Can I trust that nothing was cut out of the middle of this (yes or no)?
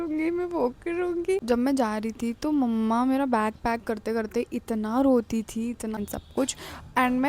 no